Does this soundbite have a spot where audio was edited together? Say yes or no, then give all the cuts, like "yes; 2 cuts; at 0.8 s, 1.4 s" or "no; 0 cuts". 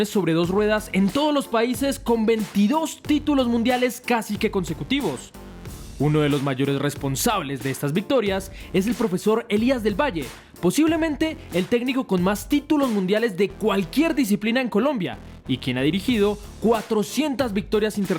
no; 0 cuts